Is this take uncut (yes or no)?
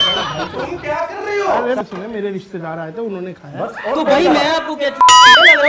no